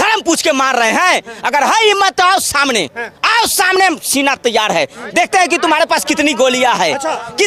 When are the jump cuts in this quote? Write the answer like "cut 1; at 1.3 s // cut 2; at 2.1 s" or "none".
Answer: none